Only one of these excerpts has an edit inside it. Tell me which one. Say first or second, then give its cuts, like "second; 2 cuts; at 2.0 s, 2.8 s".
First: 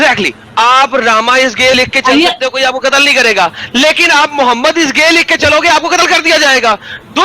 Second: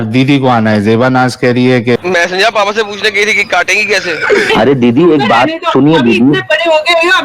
second; 2 cuts; at 2.0 s, 4.5 s